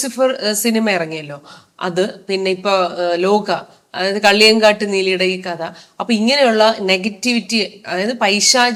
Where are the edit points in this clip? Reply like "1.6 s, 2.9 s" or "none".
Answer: none

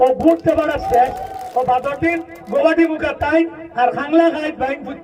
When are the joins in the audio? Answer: 1.4 s, 2.3 s, 3.6 s

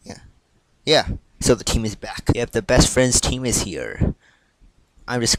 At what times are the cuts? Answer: none

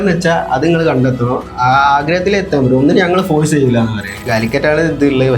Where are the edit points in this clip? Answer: 4.2 s

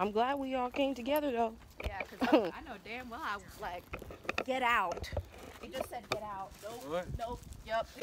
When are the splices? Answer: none

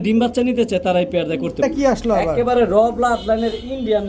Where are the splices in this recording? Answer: 1.6 s

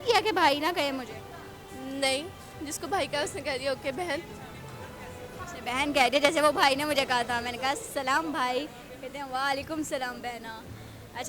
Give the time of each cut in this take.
none

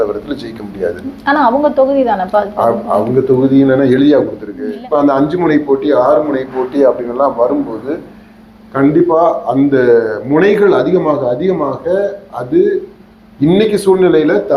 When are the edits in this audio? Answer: 4.7 s

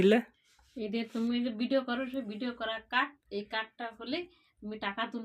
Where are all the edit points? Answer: none

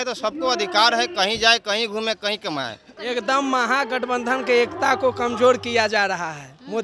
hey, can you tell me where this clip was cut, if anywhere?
3.0 s

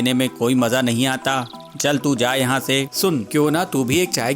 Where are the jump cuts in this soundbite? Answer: 2.9 s

